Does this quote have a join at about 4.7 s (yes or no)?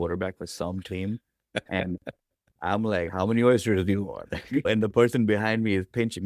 yes